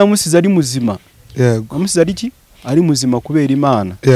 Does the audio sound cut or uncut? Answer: uncut